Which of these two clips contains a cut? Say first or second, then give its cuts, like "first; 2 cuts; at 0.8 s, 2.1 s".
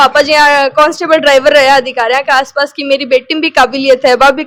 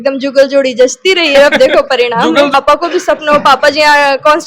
second; 1 cut; at 2.5 s